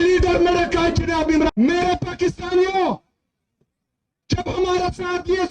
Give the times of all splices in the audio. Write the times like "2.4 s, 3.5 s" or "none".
1.5 s